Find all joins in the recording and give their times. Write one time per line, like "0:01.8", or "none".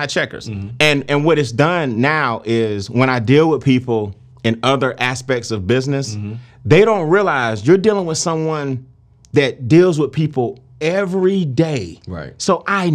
none